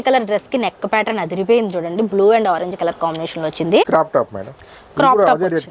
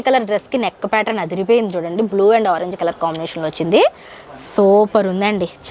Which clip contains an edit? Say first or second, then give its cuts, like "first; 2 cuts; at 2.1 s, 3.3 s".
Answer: first; 1 cut; at 3.8 s